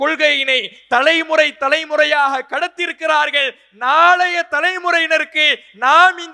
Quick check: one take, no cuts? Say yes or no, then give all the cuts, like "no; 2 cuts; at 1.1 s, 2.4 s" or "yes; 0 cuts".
yes; 0 cuts